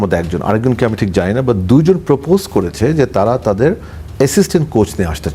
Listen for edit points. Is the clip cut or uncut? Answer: uncut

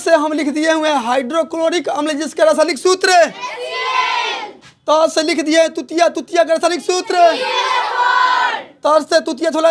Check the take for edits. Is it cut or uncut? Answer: uncut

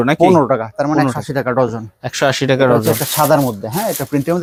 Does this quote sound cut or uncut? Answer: uncut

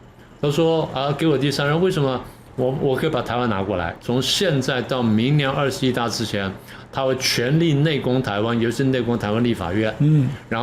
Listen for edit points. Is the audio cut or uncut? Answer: cut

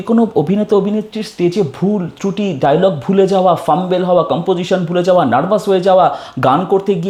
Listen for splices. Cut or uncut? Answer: uncut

